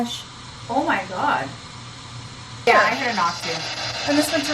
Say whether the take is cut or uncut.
cut